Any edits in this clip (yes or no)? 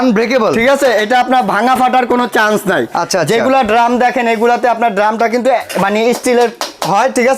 no